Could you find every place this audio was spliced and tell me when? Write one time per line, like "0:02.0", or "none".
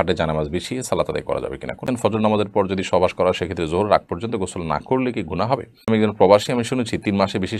0:01.8
0:05.9